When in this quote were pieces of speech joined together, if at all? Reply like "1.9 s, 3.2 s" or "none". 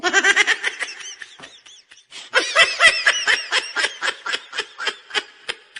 none